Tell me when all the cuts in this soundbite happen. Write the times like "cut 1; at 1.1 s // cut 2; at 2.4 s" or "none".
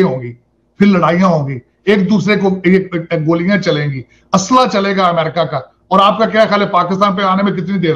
none